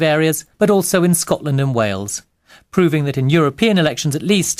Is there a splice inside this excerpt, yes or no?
yes